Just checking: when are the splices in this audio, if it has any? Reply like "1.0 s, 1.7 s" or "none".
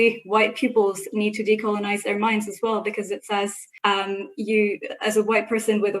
3.6 s